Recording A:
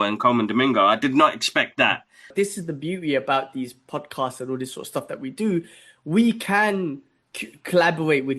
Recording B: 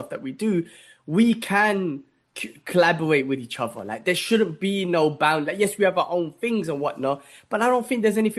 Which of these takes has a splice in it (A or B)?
A